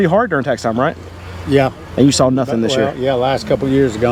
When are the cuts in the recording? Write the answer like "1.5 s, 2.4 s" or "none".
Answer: none